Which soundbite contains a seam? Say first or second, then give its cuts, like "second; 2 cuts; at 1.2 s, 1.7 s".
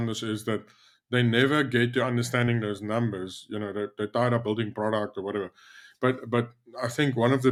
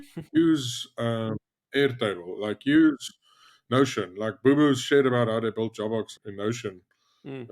second; 1 cut; at 6.2 s